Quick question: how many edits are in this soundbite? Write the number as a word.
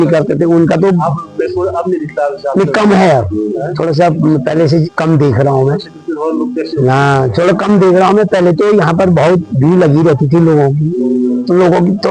zero